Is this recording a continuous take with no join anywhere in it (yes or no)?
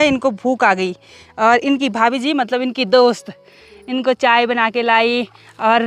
yes